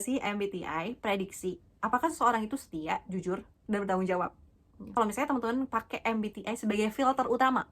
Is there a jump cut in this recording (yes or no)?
yes